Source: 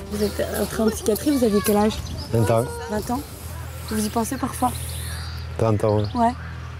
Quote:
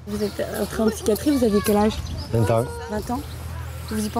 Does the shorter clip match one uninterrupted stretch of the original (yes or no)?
yes